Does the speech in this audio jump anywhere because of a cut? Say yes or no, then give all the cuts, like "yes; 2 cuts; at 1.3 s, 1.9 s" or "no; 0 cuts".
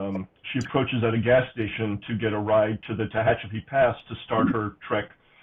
no; 0 cuts